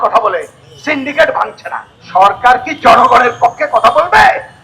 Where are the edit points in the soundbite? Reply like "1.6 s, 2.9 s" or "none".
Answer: 2.0 s